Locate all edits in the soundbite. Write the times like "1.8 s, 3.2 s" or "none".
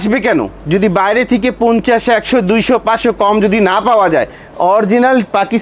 4.4 s